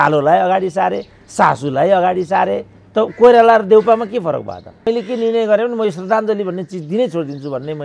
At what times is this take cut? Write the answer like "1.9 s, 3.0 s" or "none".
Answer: 4.9 s